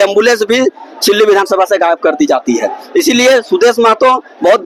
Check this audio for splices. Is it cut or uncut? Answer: uncut